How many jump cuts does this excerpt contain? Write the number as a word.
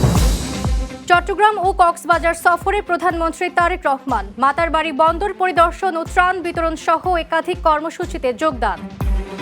one